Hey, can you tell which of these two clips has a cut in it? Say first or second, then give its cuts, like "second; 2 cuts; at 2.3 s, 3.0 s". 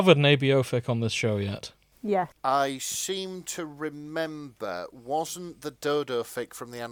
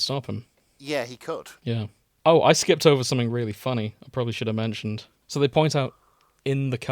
second; 2 cuts; at 1.5 s, 5.1 s